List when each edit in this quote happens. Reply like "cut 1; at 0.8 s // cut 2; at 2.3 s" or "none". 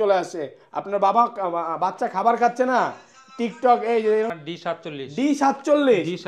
cut 1; at 4.3 s